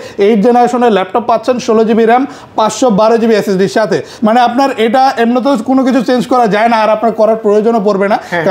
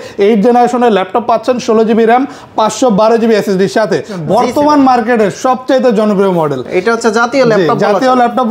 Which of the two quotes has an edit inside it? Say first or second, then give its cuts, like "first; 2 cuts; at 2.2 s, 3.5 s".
second; 1 cut; at 4.1 s